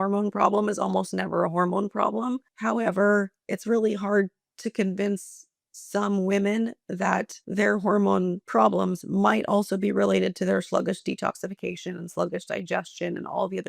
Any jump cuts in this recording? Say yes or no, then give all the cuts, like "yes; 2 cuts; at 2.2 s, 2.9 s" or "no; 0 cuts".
yes; 3 cuts; at 2.5 s, 7.4 s, 8.4 s